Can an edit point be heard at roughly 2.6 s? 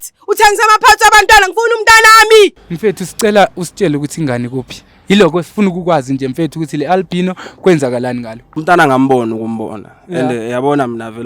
yes; 2 cuts; at 2.6 s, 8.6 s

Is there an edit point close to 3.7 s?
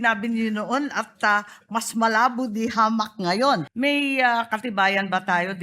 yes; 1 cut; at 3.7 s

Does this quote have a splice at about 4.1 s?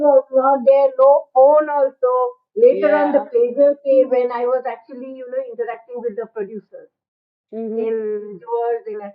yes; 1 cut; at 4.1 s

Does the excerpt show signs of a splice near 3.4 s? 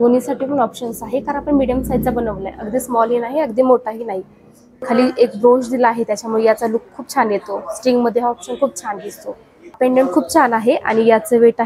no; 2 cuts; at 4.8 s, 9.8 s

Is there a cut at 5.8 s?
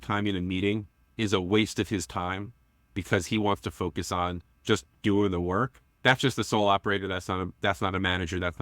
yes; 2 cuts; at 1.0 s, 5.8 s

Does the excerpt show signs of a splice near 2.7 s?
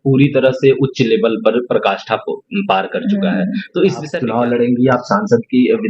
no; 1 cut; at 4.2 s

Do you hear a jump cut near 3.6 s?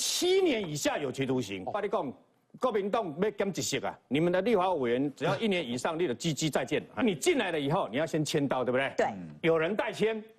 no; 2 cuts; at 1.8 s, 7.0 s

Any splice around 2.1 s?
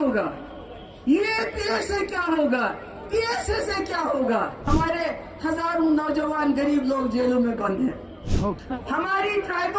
no; 2 cuts; at 4.7 s, 8.3 s

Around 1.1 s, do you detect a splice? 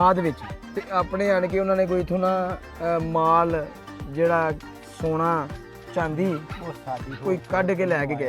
no; 0 cuts

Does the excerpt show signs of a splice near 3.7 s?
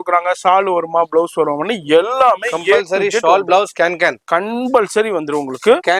no; 0 cuts

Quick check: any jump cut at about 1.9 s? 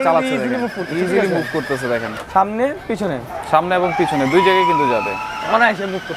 no; 0 cuts

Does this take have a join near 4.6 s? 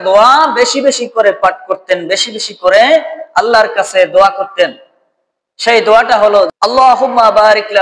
no; 1 cut; at 6.5 s

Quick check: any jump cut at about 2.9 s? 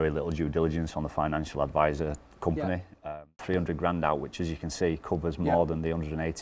yes; 1 cut; at 2.9 s

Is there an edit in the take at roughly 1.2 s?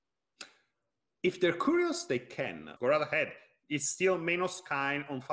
no; 1 cut; at 2.7 s

